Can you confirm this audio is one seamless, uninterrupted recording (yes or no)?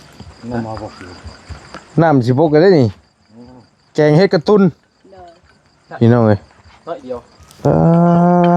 yes